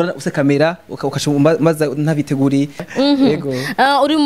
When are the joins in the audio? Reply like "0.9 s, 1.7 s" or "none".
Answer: 2.8 s